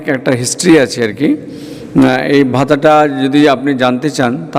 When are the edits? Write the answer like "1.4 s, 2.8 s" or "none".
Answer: none